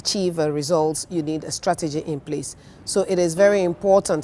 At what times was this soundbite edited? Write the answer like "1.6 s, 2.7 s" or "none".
none